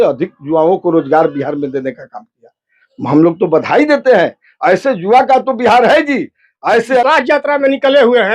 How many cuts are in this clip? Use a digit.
1